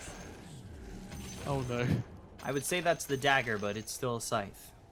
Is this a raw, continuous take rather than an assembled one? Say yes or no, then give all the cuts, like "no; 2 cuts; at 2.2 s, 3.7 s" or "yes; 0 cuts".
yes; 0 cuts